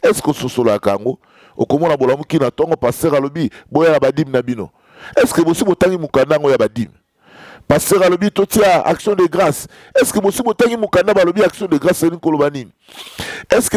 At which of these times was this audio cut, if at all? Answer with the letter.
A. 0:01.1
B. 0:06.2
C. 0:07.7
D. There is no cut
D